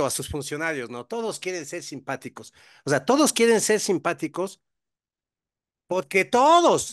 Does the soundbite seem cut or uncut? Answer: uncut